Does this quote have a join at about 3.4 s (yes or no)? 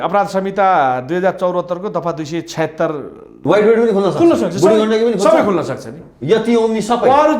yes